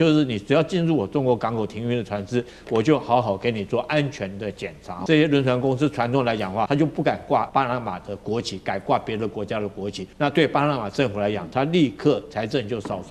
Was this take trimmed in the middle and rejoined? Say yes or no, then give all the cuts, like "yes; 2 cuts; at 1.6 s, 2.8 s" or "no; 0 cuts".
yes; 4 cuts; at 5.0 s, 6.7 s, 7.5 s, 10.0 s